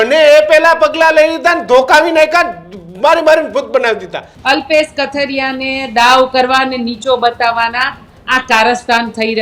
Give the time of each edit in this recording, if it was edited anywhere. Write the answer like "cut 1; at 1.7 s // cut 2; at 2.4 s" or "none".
cut 1; at 4.3 s